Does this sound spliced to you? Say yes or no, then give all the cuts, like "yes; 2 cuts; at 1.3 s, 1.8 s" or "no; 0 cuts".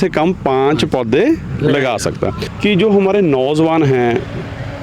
yes; 1 cut; at 2.4 s